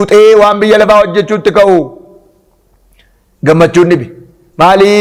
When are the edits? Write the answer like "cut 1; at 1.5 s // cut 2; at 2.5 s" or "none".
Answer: none